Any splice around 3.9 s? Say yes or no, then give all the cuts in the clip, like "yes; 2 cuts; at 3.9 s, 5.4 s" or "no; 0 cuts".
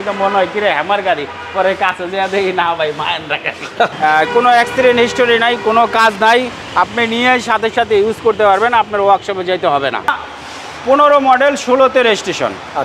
yes; 2 cuts; at 3.9 s, 10.1 s